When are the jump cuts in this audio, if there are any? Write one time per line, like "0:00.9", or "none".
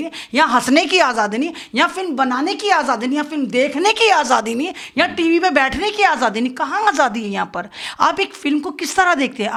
none

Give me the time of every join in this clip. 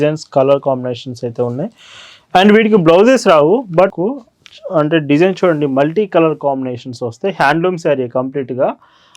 0:04.0

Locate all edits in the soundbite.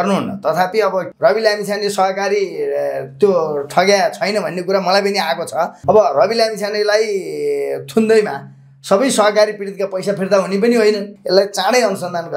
0:01.1
0:05.8
0:11.1

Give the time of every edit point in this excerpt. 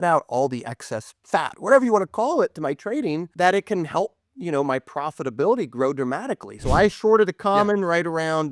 0:03.3
0:06.5

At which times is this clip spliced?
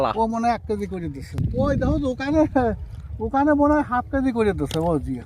0:01.3

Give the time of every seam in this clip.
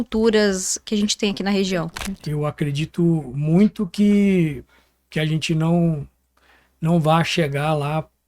0:01.9

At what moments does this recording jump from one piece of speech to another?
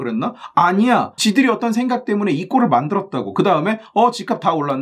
none

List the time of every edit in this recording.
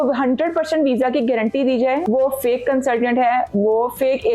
0:02.0

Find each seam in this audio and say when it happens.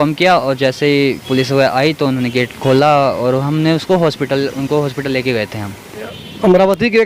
none

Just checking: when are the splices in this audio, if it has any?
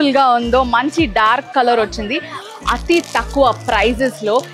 0:02.5

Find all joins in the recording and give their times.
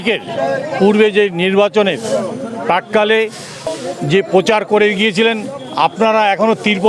0:03.7

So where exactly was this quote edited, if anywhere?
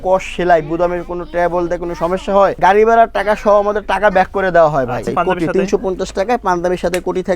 0:02.6
0:05.1

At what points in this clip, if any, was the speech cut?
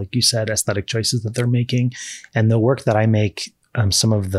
none

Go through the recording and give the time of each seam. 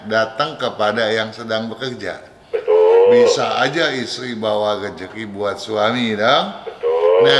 none

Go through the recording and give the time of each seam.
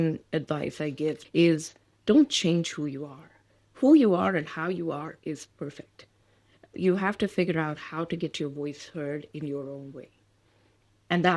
0:01.2

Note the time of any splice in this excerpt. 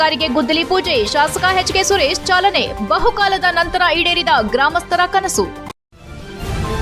0:05.7

